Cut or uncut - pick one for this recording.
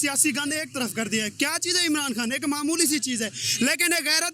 uncut